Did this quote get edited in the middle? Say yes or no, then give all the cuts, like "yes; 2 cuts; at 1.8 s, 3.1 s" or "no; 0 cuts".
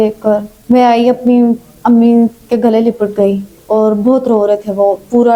no; 0 cuts